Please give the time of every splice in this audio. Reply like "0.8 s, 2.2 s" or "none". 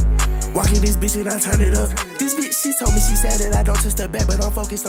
none

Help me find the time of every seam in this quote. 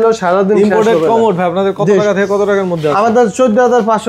none

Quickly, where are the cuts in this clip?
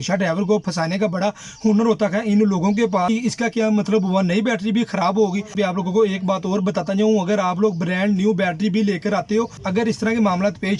3.1 s, 5.5 s, 9.5 s

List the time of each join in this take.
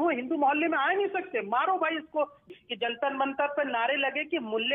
2.5 s

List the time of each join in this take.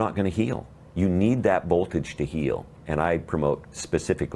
2.8 s

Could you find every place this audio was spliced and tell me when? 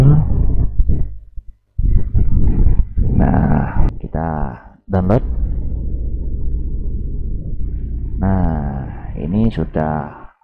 3.9 s

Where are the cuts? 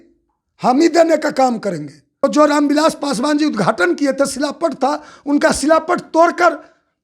2.0 s

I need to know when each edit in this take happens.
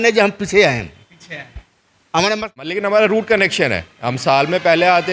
2.7 s

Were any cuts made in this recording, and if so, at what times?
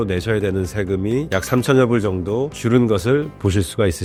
none

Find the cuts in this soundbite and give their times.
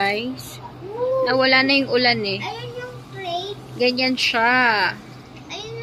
none

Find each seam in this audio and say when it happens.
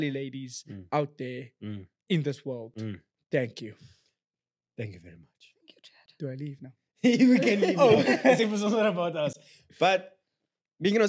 none

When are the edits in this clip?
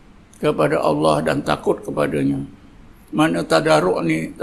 none

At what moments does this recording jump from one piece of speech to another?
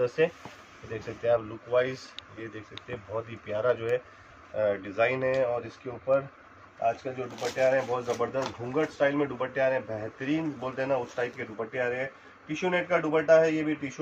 none

